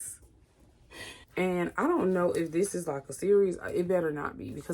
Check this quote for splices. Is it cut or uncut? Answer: cut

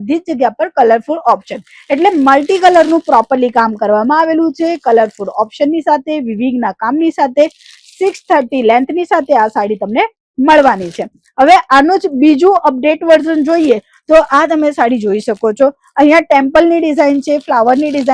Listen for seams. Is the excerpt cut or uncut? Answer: uncut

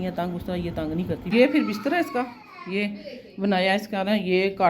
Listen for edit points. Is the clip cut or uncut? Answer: cut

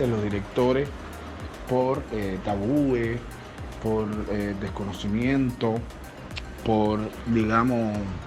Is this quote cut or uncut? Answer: cut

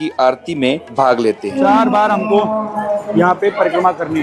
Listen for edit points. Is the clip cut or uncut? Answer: cut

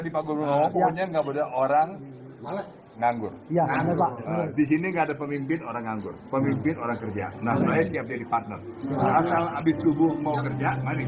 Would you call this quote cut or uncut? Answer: uncut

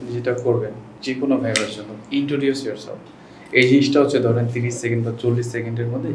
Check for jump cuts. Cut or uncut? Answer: uncut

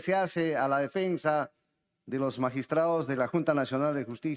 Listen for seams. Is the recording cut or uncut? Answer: uncut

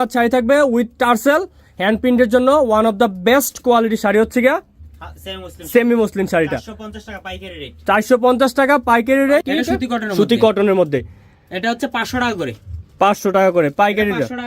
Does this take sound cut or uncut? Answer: cut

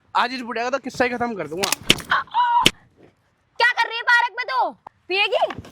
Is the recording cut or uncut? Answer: cut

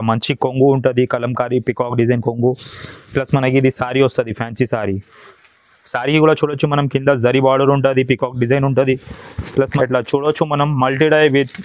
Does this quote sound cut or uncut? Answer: cut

